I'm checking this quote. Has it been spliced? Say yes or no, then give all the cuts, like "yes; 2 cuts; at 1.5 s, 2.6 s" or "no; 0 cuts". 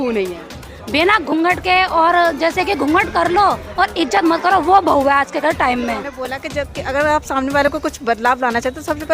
yes; 1 cut; at 6.4 s